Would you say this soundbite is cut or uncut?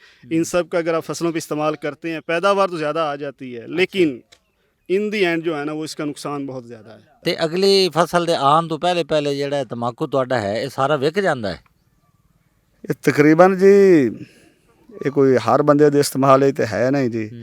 cut